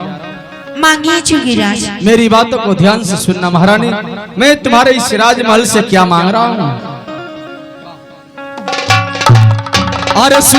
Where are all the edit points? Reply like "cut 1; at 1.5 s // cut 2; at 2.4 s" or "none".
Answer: none